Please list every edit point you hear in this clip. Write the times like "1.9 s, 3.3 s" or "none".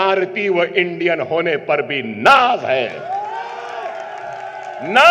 none